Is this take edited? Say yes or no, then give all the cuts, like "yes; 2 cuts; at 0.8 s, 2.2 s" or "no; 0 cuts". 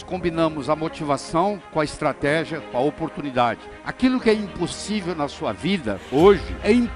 yes; 1 cut; at 3.7 s